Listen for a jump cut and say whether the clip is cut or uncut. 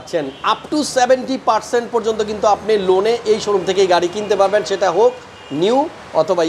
uncut